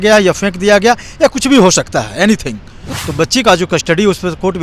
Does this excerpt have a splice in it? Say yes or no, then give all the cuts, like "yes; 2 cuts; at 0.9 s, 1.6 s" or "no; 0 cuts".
yes; 1 cut; at 2.8 s